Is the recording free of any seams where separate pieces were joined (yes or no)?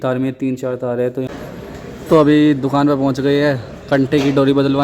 no